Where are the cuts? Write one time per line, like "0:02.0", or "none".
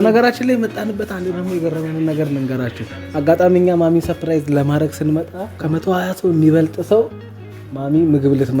0:05.6